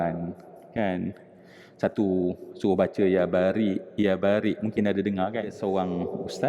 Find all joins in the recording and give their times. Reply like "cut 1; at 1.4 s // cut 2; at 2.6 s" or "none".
cut 1; at 5.6 s